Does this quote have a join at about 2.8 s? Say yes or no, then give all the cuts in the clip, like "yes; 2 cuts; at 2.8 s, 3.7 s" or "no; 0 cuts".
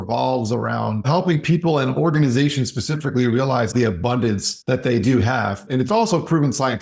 no; 3 cuts; at 1.1 s, 4.2 s, 5.6 s